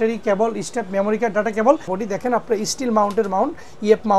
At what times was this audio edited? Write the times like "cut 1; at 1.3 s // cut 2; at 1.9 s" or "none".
cut 1; at 2.0 s